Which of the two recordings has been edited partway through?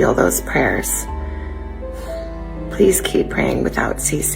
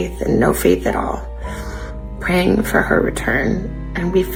first; 2 cuts; at 1.0 s, 2.4 s

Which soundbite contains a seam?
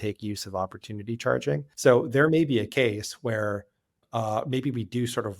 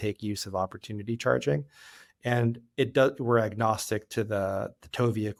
first; 2 cuts; at 1.7 s, 4.0 s

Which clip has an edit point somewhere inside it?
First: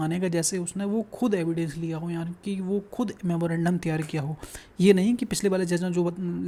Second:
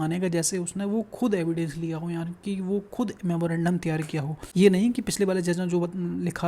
second; 1 cut; at 4.4 s

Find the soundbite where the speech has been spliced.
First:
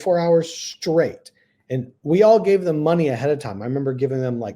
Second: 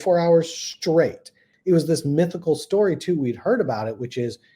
second; 1 cut; at 1.5 s

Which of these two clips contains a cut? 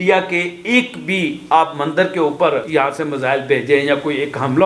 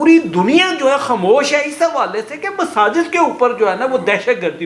first; 1 cut; at 2.7 s

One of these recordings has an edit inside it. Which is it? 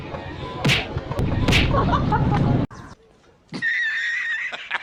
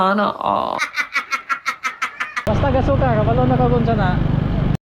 second; 1 cut; at 2.4 s

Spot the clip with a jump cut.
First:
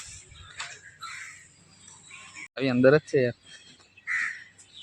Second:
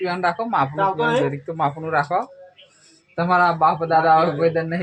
first; 1 cut; at 2.5 s

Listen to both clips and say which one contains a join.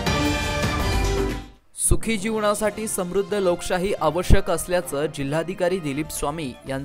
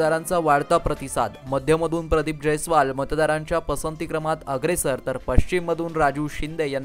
first; 1 cut; at 1.0 s

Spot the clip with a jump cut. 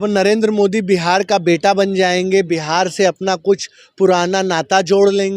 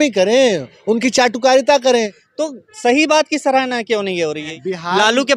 second; 2 cuts; at 2.2 s, 4.5 s

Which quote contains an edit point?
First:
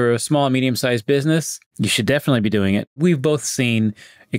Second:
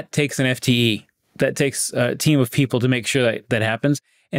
first; 2 cuts; at 1.6 s, 3.0 s

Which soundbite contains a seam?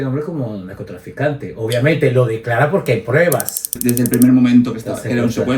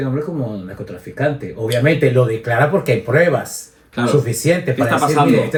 first; 1 cut; at 3.8 s

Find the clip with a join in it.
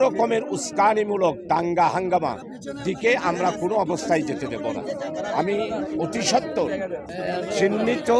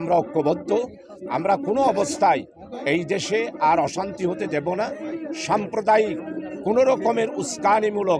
first; 1 cut; at 7.1 s

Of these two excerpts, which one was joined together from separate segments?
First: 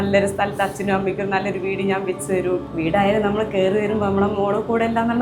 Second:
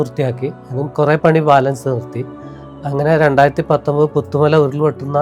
first; 1 cut; at 2.7 s

